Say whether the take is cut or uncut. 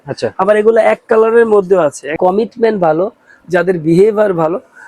cut